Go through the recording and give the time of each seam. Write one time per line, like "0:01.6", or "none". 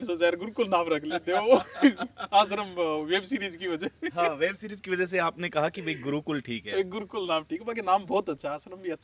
none